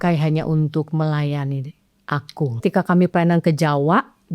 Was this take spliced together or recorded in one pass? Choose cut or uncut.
cut